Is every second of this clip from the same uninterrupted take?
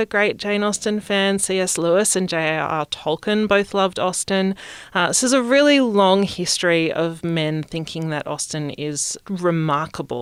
yes; 0 cuts

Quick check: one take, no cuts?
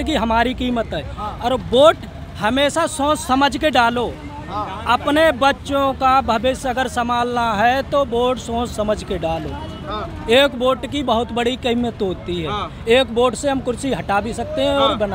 yes; 0 cuts

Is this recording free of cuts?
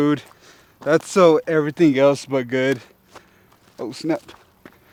yes; 0 cuts

